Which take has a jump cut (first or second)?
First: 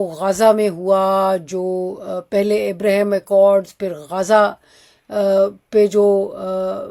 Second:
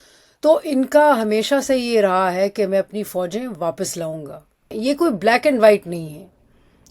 second